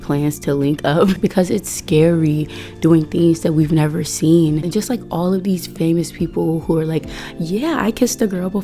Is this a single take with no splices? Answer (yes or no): no